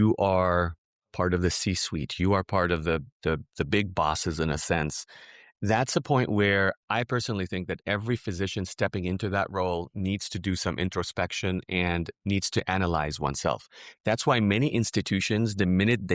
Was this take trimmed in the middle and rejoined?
no; 0 cuts

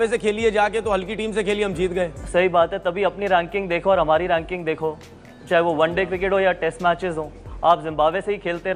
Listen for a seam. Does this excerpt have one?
no; 0 cuts

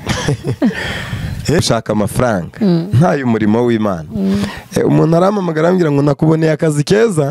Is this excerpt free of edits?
no; 1 cut; at 1.6 s

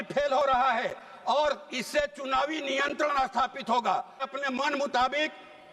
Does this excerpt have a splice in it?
yes; 1 cut; at 4.2 s

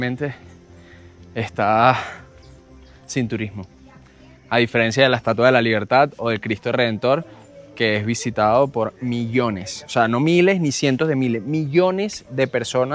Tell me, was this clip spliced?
no; 0 cuts

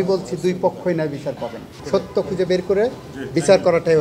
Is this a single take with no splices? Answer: no; 1 cut; at 1.7 s

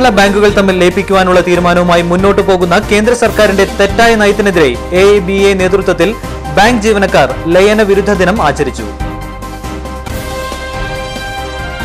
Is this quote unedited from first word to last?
yes; 0 cuts

